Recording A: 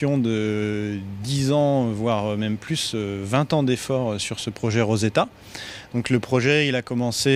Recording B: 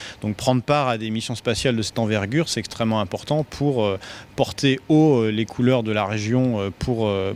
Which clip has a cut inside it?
B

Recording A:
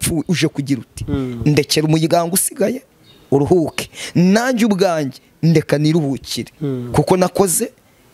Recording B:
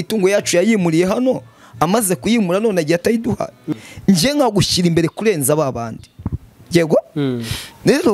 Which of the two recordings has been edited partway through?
B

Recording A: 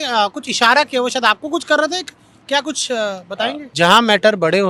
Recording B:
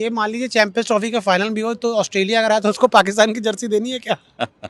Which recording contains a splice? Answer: A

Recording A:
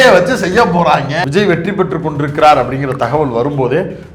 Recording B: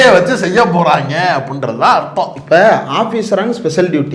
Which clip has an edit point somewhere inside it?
A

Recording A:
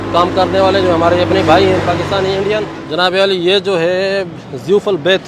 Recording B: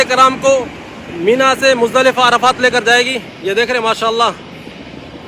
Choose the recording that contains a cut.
A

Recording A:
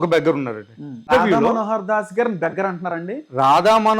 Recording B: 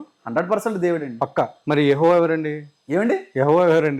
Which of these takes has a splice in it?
A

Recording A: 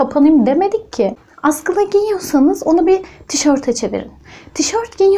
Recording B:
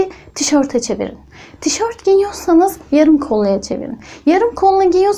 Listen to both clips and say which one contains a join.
A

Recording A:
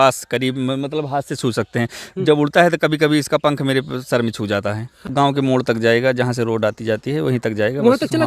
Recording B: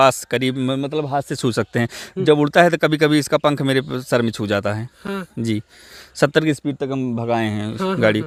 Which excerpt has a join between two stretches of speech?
A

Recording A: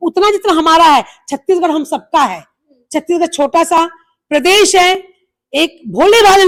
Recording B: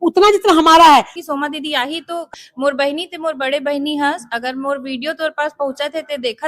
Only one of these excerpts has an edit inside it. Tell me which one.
B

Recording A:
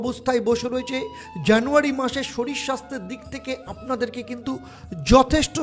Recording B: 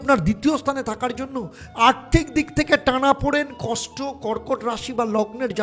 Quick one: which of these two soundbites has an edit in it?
B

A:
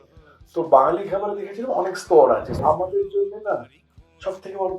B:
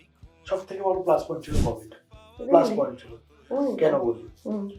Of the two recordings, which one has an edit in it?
A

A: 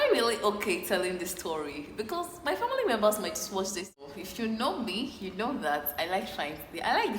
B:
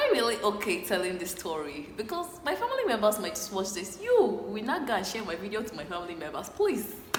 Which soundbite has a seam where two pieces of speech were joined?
A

